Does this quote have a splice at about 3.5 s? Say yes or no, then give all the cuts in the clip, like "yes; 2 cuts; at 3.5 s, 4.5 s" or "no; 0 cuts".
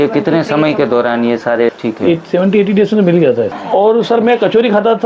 yes; 2 cuts; at 1.7 s, 3.5 s